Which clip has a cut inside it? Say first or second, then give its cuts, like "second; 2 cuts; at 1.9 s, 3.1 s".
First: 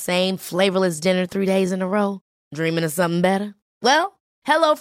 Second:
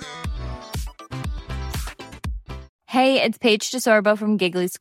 second; 1 cut; at 2.7 s